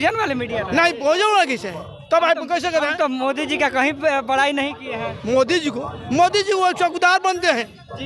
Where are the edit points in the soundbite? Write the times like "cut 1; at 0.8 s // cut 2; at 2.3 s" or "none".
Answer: none